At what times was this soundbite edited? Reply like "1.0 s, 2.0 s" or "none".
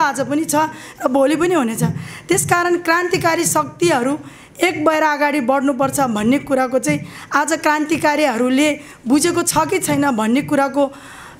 none